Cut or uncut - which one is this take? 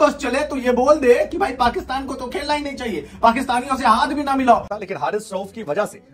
cut